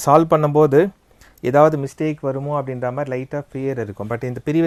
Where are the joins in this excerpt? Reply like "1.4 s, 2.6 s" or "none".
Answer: none